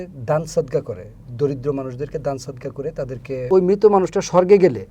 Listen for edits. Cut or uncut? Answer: cut